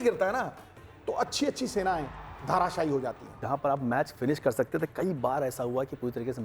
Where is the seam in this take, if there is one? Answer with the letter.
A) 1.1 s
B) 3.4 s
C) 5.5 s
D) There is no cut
B